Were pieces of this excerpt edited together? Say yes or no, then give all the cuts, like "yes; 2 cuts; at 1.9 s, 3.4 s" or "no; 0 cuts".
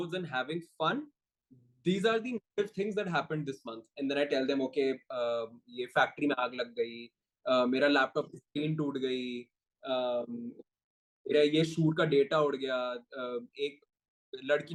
no; 0 cuts